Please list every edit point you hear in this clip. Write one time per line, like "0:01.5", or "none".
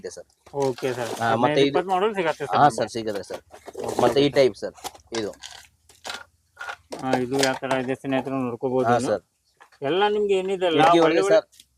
none

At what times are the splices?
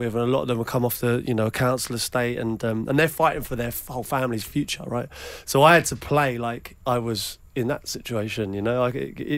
none

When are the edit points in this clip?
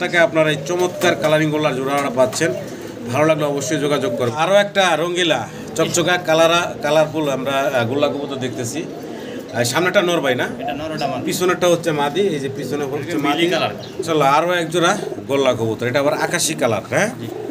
0:04.3
0:14.0

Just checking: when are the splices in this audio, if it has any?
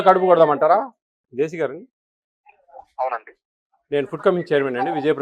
0:01.2

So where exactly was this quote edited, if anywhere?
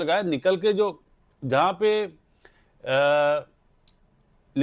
none

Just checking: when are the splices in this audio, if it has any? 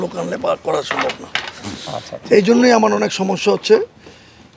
none

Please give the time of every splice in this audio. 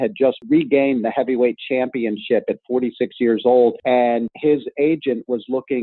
0:03.8

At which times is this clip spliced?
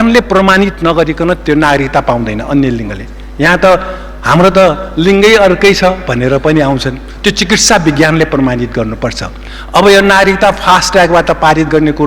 none

